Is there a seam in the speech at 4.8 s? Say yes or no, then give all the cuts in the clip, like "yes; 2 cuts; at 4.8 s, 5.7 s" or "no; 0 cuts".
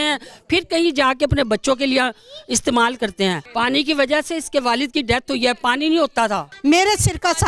no; 2 cuts; at 3.4 s, 6.5 s